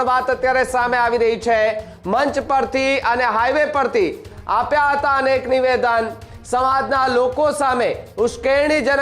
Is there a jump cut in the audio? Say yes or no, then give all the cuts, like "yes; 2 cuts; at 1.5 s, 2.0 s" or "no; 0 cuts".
no; 0 cuts